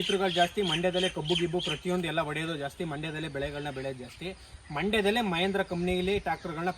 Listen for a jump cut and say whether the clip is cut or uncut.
uncut